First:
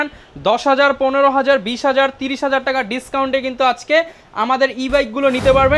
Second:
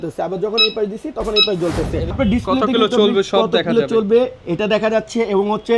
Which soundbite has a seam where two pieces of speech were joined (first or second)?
second